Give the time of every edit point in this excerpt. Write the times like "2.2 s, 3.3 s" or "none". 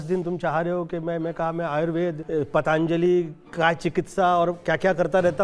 2.2 s